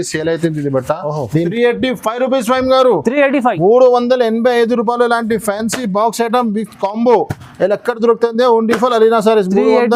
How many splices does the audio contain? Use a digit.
1